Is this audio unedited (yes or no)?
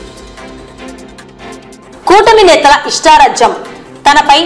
yes